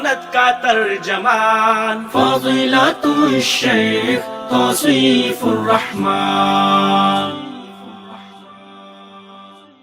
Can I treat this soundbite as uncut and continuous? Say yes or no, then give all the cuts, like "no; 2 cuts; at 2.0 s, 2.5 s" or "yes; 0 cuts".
yes; 0 cuts